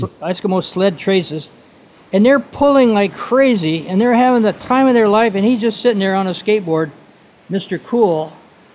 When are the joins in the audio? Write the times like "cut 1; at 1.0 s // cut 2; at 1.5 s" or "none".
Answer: none